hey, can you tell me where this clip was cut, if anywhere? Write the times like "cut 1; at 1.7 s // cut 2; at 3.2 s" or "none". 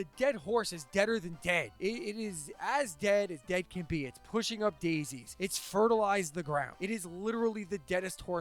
cut 1; at 1.7 s // cut 2; at 5.2 s // cut 3; at 6.7 s

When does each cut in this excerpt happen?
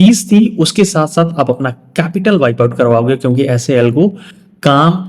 none

